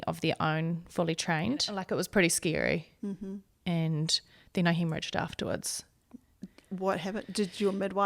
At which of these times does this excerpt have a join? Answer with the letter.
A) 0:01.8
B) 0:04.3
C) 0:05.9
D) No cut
A